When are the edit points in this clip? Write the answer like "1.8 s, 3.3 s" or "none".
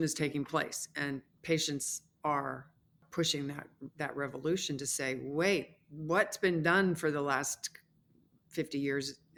none